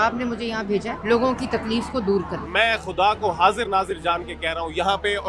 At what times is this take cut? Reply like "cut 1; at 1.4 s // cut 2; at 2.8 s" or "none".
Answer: cut 1; at 0.9 s // cut 2; at 2.4 s